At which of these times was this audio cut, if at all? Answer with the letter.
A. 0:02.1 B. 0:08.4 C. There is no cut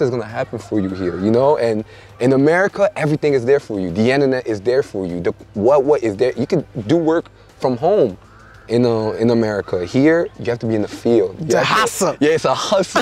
C